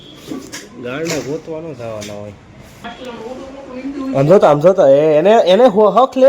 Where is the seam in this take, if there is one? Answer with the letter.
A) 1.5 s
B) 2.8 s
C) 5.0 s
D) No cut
B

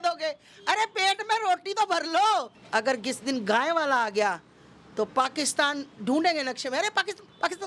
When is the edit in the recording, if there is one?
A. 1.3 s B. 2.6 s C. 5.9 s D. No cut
B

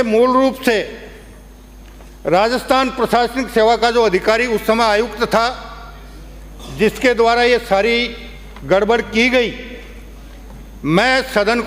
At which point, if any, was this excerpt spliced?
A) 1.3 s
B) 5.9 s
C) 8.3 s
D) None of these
D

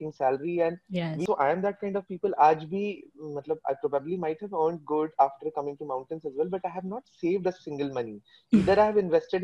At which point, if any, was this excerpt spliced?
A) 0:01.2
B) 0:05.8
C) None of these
A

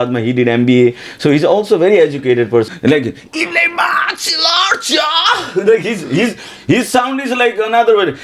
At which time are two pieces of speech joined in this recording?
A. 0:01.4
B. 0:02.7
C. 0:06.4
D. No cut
B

